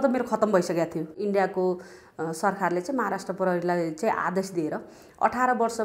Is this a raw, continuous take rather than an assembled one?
no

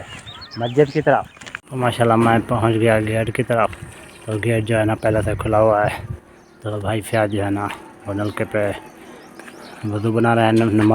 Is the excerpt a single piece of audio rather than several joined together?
no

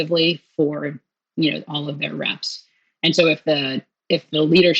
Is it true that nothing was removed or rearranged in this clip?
yes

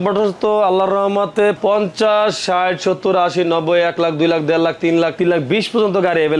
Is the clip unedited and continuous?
no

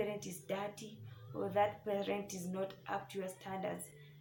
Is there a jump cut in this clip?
no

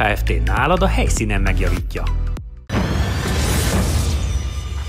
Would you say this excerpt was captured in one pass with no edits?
yes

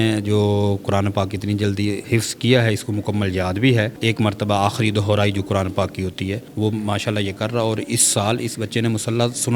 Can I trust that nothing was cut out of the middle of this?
no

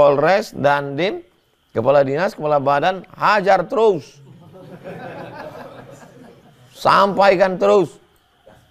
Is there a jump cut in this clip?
no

